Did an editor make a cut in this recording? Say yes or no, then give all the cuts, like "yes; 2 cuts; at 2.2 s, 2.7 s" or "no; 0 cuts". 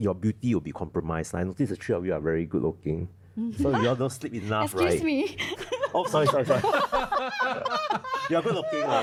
no; 0 cuts